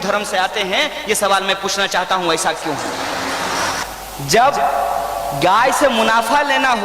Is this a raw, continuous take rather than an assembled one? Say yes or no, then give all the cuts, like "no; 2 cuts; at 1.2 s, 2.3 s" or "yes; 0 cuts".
no; 1 cut; at 3.8 s